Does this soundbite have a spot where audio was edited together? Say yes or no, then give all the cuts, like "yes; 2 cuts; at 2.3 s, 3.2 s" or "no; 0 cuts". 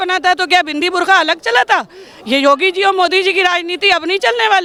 no; 0 cuts